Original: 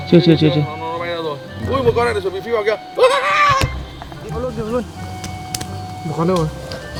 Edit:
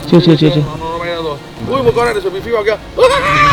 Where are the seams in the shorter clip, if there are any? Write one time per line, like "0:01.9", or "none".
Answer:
none